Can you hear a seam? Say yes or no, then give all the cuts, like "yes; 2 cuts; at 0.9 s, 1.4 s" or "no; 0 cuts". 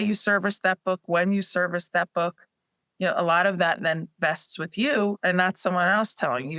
no; 0 cuts